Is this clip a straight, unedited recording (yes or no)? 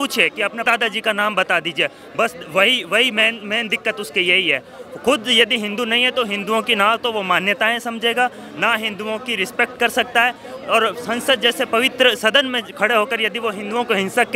yes